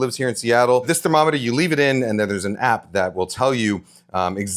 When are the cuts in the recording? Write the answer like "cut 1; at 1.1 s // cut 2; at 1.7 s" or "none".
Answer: none